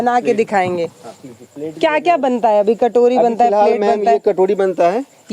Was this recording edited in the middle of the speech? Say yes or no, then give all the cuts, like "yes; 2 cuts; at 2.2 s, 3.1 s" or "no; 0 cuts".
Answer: no; 0 cuts